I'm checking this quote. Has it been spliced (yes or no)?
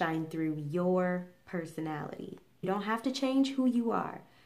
yes